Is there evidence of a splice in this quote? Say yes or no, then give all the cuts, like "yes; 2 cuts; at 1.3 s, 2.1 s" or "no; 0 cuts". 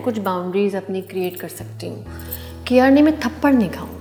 no; 0 cuts